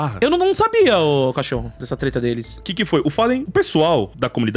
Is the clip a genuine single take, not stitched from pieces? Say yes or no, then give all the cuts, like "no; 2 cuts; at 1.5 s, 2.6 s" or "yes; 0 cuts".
yes; 0 cuts